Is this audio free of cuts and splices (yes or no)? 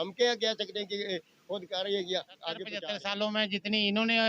no